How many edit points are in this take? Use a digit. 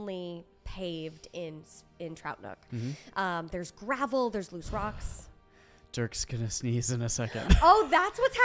0